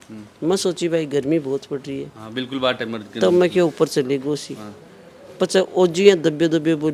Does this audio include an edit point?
no; 0 cuts

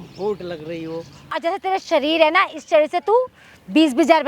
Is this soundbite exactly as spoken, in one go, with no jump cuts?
no; 1 cut; at 1.3 s

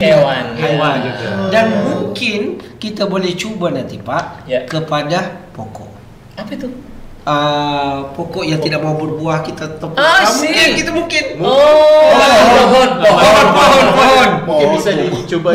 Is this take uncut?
yes; 0 cuts

